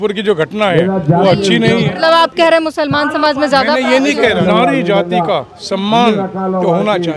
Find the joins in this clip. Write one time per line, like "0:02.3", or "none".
0:01.9
0:04.4